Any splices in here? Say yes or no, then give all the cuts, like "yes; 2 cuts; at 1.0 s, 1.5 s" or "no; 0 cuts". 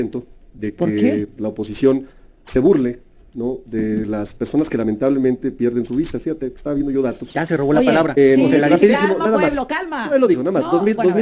no; 0 cuts